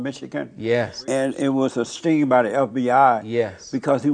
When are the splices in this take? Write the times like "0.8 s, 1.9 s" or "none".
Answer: 1.0 s, 1.9 s